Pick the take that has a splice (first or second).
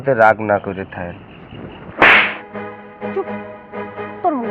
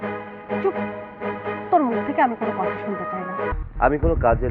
second